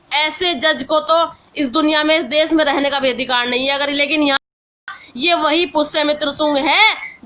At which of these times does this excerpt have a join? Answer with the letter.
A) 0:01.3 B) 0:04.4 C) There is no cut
B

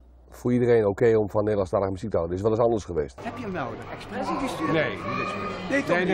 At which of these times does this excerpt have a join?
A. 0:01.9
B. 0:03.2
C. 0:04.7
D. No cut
B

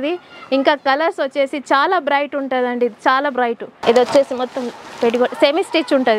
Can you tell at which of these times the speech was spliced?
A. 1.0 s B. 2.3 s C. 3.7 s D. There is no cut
C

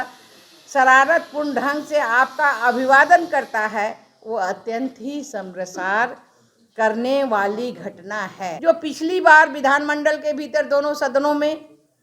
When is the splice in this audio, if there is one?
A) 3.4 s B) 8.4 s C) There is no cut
B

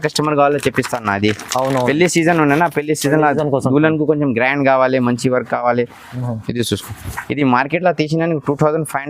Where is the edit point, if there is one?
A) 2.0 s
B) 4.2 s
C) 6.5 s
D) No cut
D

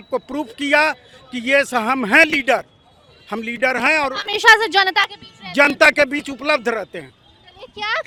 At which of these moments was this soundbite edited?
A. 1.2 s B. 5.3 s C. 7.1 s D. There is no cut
D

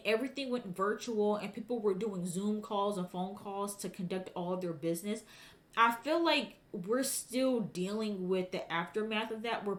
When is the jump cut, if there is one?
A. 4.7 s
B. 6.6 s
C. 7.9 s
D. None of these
D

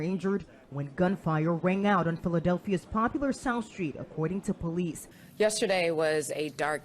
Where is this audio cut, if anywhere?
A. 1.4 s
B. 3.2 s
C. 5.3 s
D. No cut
C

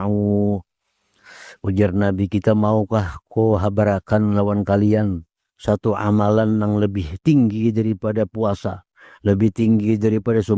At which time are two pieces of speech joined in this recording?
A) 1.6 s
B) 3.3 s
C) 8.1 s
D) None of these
D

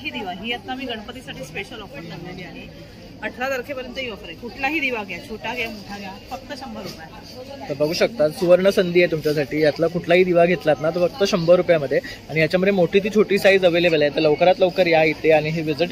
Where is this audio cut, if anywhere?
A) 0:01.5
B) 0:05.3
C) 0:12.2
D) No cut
D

